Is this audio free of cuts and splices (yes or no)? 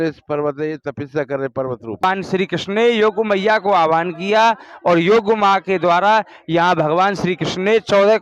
no